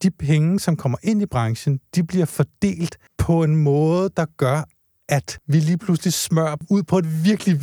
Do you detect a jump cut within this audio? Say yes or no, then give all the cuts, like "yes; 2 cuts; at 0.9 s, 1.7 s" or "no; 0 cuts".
yes; 3 cuts; at 3.1 s, 5.4 s, 6.6 s